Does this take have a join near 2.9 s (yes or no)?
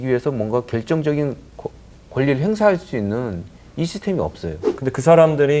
no